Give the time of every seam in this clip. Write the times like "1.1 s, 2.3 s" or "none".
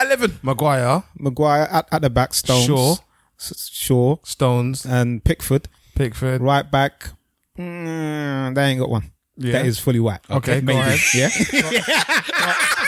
none